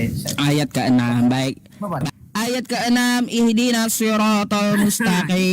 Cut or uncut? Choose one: cut